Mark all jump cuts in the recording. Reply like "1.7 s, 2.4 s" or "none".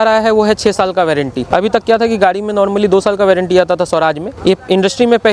1.4 s, 4.3 s